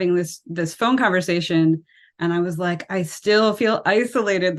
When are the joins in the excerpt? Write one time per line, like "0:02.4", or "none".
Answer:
none